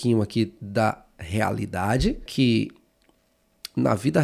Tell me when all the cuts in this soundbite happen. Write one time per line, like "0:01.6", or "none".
0:02.3